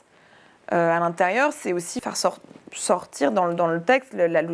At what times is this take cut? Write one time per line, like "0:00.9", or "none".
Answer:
0:02.0

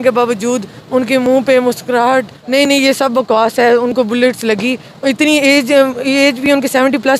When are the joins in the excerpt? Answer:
0:02.3

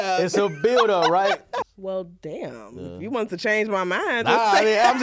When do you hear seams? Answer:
0:01.6

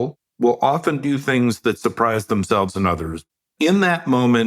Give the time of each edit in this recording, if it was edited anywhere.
0:03.4

